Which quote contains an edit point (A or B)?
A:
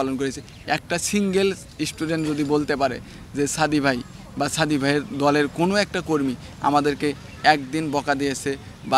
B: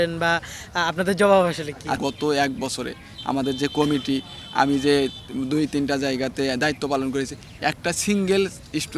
B